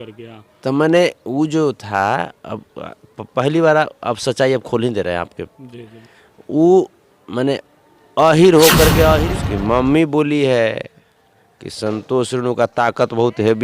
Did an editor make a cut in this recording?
yes; 1 cut; at 9.2 s

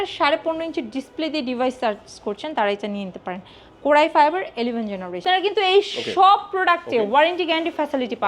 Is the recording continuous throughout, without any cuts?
no; 1 cut; at 5.2 s

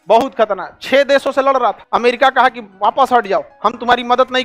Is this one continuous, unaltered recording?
no; 2 cuts; at 1.8 s, 2.7 s

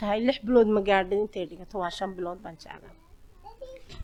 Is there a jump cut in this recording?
no; 0 cuts

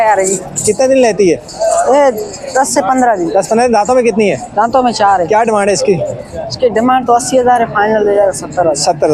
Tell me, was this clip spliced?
no; 0 cuts

